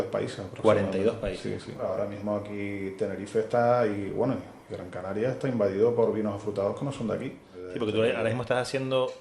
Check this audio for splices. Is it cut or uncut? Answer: cut